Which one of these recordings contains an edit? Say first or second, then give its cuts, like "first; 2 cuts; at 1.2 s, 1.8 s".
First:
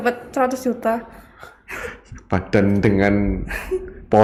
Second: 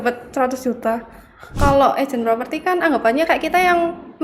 second; 1 cut; at 1.6 s